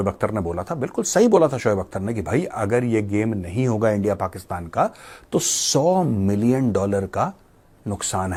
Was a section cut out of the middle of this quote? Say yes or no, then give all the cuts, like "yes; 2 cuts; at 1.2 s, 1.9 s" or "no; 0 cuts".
no; 0 cuts